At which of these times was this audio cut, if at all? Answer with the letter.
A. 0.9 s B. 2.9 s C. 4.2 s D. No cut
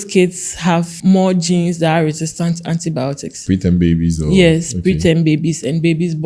A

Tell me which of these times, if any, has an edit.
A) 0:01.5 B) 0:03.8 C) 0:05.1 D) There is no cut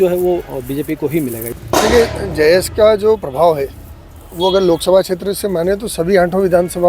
A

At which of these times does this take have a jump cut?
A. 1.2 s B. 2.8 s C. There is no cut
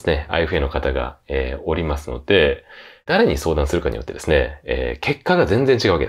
C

